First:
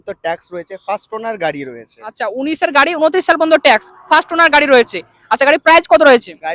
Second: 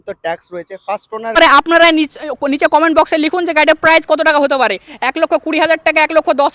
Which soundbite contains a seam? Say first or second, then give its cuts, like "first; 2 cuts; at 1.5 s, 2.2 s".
second; 1 cut; at 1.4 s